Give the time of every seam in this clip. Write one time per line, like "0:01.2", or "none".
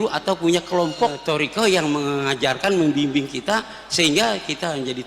0:01.2